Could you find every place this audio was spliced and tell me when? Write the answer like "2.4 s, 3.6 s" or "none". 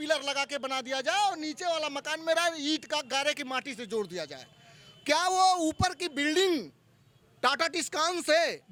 none